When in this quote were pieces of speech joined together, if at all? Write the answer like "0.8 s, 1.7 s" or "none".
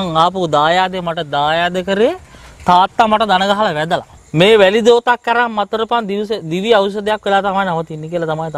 4.2 s